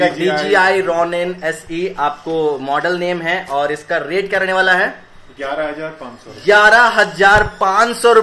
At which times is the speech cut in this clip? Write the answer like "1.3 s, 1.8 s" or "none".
none